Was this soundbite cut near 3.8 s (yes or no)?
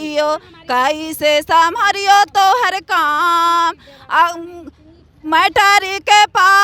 no